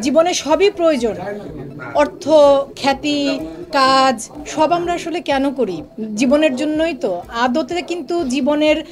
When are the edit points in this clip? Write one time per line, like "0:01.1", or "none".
none